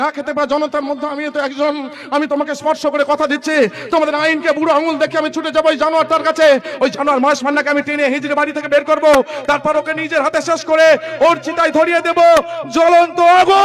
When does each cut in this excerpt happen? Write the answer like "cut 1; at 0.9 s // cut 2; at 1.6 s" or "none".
none

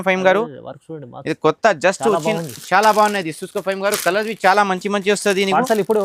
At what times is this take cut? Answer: none

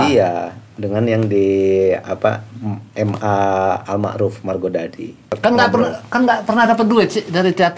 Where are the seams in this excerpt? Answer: cut 1; at 5.2 s

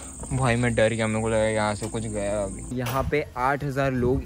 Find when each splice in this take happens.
cut 1; at 2.6 s

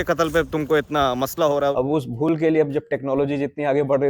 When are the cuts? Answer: cut 1; at 1.7 s

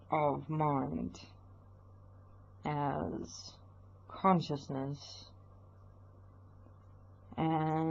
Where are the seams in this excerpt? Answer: cut 1; at 4.3 s

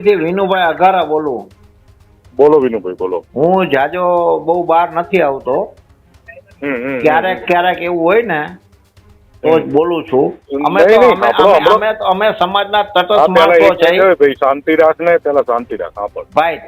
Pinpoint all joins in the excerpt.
cut 1; at 3.2 s // cut 2; at 10.4 s

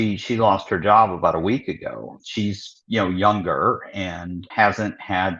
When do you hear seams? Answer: cut 1; at 2.2 s // cut 2; at 4.5 s

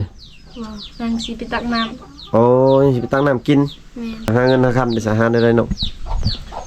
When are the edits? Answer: cut 1; at 4.3 s

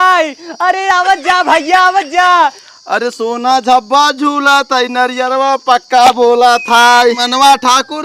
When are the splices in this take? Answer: cut 1; at 2.6 s

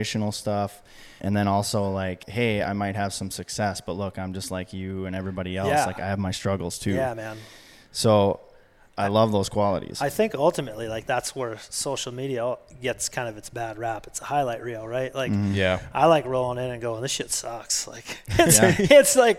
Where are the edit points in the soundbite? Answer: cut 1; at 1.2 s // cut 2; at 2.3 s // cut 3; at 11.0 s

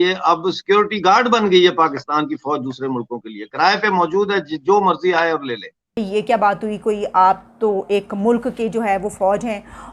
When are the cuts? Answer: cut 1; at 6.0 s

